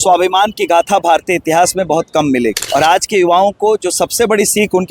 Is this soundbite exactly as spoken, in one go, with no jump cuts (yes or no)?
no